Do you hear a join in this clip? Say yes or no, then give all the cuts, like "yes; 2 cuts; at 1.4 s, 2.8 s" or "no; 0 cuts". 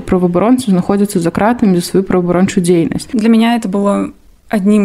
yes; 1 cut; at 3.0 s